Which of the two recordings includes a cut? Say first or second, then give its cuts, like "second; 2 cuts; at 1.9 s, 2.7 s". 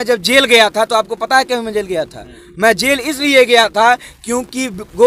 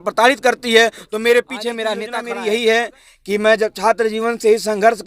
second; 1 cut; at 2.1 s